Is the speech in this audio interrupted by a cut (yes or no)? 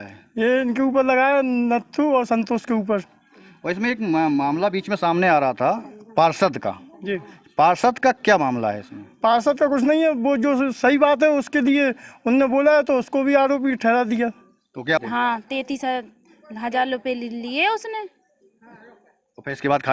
yes